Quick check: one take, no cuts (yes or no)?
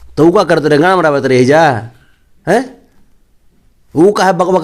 yes